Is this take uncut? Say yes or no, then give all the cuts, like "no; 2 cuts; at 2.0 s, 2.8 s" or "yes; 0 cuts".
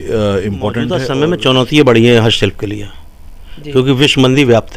no; 1 cut; at 1.0 s